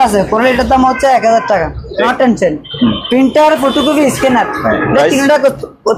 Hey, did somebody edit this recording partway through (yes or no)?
yes